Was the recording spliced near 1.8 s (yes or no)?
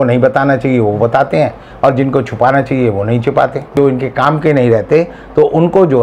no